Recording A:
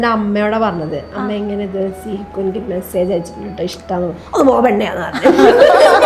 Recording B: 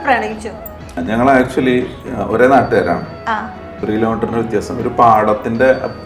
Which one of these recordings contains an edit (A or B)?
B